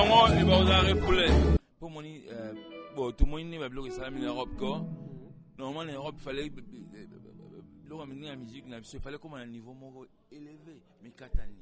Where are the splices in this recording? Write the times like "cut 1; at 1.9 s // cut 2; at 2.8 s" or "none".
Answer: cut 1; at 1.6 s

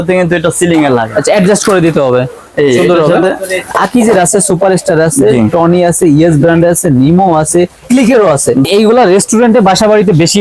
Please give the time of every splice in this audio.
cut 1; at 3.9 s // cut 2; at 8.7 s

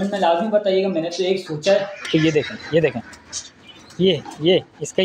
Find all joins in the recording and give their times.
cut 1; at 2.1 s

